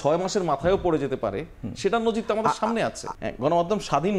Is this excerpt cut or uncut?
cut